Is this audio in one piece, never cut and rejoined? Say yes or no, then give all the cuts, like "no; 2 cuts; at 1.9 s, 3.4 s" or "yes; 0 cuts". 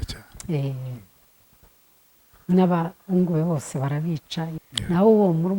no; 1 cut; at 4.6 s